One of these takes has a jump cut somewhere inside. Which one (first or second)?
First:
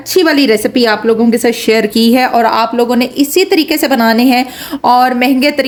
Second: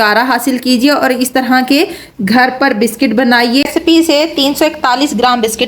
second